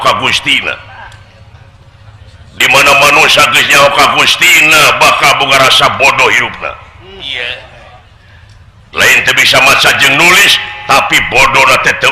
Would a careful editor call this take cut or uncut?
uncut